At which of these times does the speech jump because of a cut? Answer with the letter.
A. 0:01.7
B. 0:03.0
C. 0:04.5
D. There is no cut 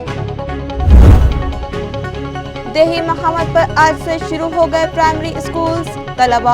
A